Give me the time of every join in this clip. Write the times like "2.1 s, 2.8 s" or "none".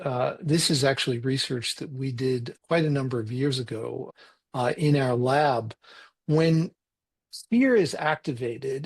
2.5 s, 4.1 s